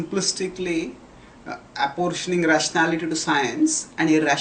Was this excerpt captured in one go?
no; 1 cut; at 3.2 s

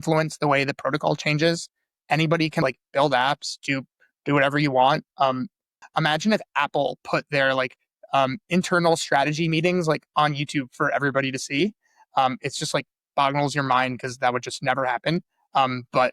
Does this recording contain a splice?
yes; 2 cuts; at 2.6 s, 5.8 s

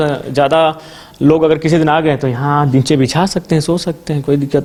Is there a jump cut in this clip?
no; 0 cuts

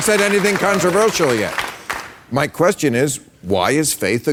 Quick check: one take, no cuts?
yes; 0 cuts

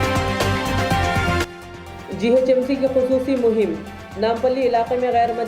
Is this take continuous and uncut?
no; 1 cut; at 1.4 s

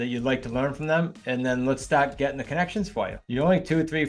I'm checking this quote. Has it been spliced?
yes; 2 cuts; at 1.2 s, 3.2 s

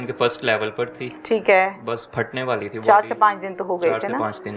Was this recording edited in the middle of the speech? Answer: no; 0 cuts

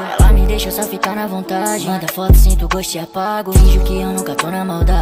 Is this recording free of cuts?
yes; 0 cuts

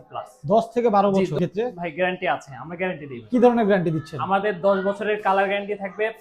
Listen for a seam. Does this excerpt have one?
yes; 1 cut; at 1.4 s

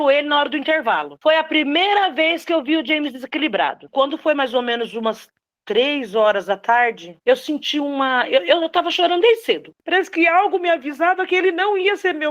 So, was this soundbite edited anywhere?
yes; 3 cuts; at 1.2 s, 3.8 s, 9.7 s

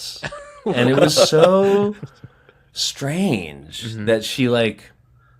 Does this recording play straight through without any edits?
yes; 0 cuts

